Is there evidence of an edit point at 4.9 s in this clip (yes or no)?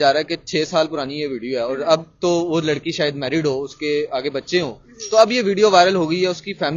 no